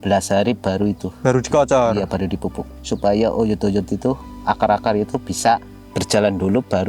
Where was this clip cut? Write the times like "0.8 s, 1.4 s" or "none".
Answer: none